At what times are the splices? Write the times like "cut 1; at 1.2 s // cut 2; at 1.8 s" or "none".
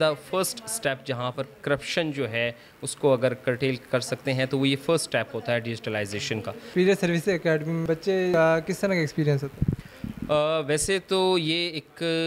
none